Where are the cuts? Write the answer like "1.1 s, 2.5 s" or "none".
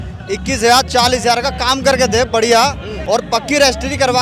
2.9 s